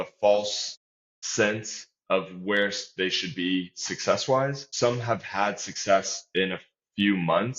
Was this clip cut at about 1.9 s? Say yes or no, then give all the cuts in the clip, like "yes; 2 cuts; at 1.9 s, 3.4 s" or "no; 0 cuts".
no; 1 cut; at 4.6 s